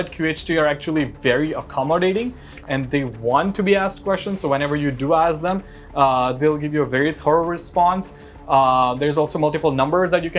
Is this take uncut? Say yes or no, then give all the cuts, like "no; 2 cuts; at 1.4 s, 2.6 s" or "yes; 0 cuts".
yes; 0 cuts